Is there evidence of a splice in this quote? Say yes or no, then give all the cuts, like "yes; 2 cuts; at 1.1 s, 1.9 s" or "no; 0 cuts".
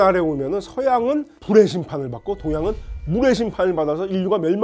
yes; 1 cut; at 1.3 s